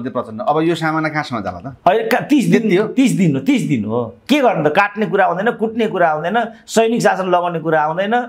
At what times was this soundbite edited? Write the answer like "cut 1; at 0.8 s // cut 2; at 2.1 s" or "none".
none

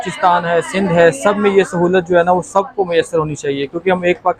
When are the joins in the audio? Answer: none

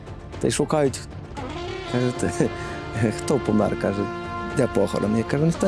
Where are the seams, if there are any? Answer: none

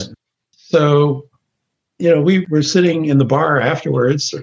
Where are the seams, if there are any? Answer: cut 1; at 2.5 s

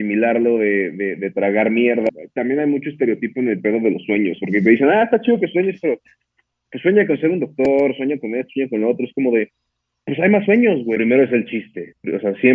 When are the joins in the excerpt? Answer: cut 1; at 2.1 s // cut 2; at 11.0 s

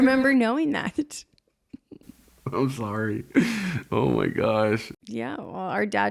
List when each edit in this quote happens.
cut 1; at 4.9 s

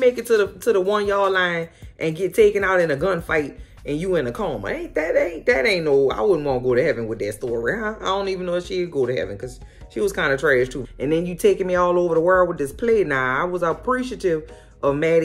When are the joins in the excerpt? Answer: cut 1; at 10.7 s

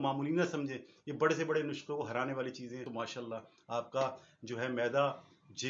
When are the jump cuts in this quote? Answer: cut 1; at 2.9 s

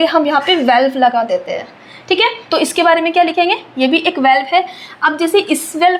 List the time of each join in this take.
none

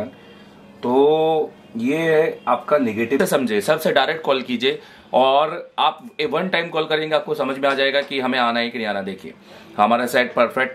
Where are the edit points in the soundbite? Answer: cut 1; at 3.2 s

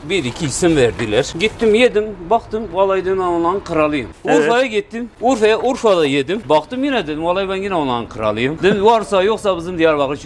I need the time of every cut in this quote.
cut 1; at 1.3 s // cut 2; at 4.1 s // cut 3; at 5.0 s // cut 4; at 6.4 s // cut 5; at 8.6 s

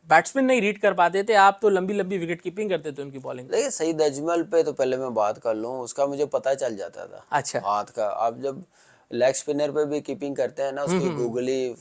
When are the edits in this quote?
none

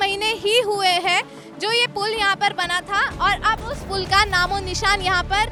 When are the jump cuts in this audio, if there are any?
none

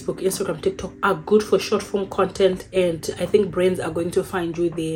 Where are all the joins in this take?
none

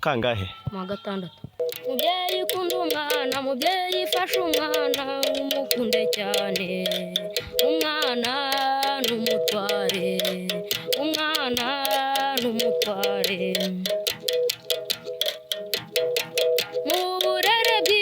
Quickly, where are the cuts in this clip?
cut 1; at 1.6 s

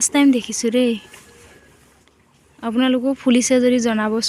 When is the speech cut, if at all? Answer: none

